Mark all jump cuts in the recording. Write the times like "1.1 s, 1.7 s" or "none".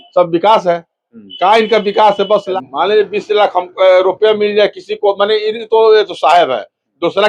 2.5 s

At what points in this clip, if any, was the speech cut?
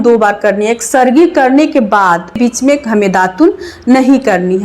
2.4 s

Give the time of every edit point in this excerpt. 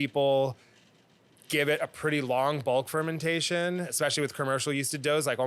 3.9 s

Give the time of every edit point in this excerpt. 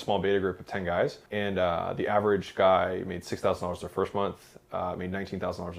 1.2 s

